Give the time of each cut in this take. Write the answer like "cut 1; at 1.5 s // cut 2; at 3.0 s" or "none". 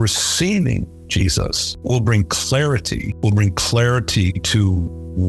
cut 1; at 1.8 s